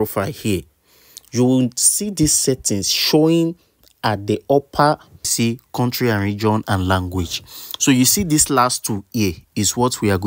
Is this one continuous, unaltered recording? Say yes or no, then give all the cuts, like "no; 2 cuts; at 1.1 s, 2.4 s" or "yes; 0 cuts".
no; 1 cut; at 5.3 s